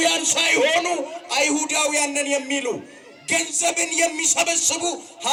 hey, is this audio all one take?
yes; 0 cuts

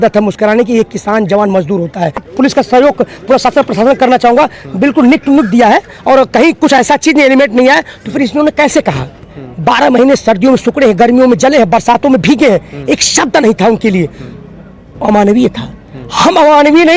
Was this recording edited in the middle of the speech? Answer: yes; 2 cuts; at 2.3 s, 9.4 s

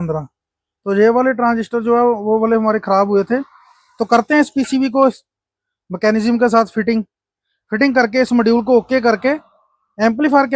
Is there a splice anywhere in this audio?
no; 0 cuts

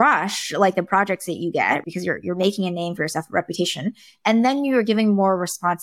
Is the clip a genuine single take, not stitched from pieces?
no; 1 cut; at 1.8 s

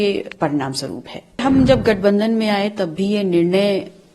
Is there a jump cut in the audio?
yes; 1 cut; at 1.4 s

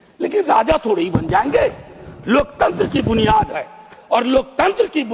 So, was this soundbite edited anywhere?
no; 0 cuts

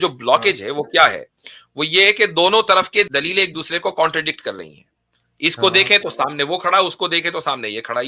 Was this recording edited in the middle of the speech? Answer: yes; 1 cut; at 3.1 s

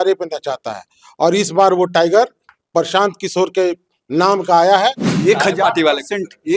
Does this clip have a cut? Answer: yes; 1 cut; at 5.1 s

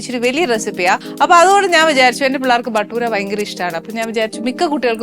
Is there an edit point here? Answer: yes; 1 cut; at 1.1 s

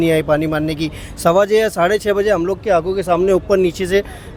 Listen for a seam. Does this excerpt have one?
no; 0 cuts

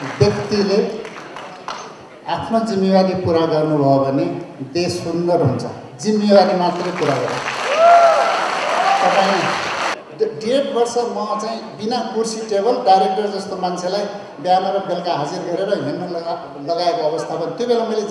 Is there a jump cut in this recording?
yes; 1 cut; at 10.0 s

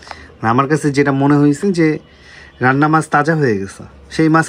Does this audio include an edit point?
no; 0 cuts

